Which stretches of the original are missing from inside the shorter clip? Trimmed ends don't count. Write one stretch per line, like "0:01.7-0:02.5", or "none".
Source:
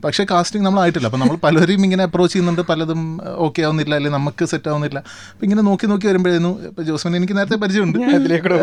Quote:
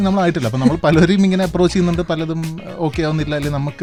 none